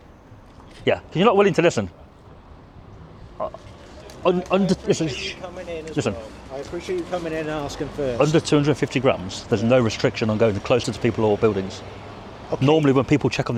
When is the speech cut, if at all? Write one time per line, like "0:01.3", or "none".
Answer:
none